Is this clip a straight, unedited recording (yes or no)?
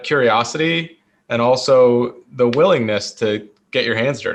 yes